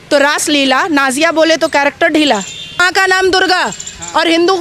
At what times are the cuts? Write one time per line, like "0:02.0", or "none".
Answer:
0:02.9